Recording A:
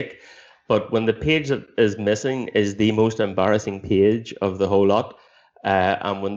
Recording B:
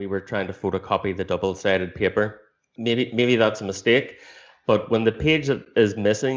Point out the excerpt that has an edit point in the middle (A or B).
B